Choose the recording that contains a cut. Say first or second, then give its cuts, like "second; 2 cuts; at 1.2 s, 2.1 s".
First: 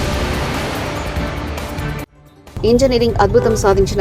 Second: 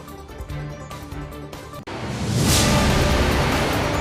first; 1 cut; at 2.2 s